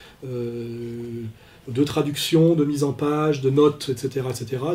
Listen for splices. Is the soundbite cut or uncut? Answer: cut